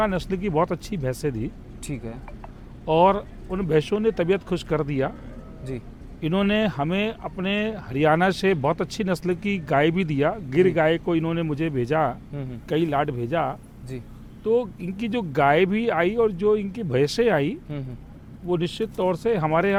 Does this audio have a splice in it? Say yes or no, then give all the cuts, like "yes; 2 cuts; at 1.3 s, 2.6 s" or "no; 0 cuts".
no; 0 cuts